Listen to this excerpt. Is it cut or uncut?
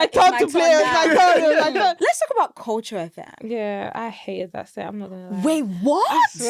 cut